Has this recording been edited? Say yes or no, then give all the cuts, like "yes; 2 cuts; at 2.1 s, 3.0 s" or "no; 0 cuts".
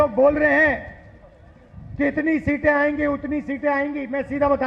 no; 0 cuts